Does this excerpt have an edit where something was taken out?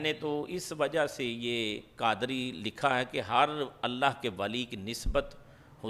no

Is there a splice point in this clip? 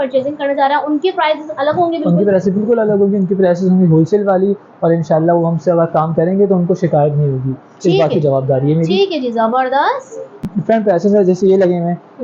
yes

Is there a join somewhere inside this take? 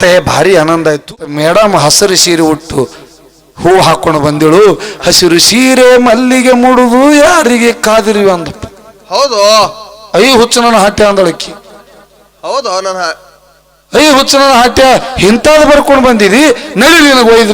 yes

